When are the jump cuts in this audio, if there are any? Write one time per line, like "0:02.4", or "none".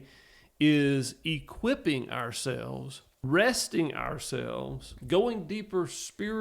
0:03.2